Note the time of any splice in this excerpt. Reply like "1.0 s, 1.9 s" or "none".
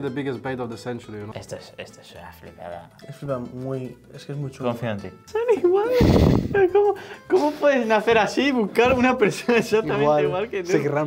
1.2 s, 5.2 s